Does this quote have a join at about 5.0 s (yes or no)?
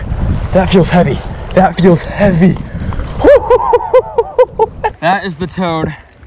yes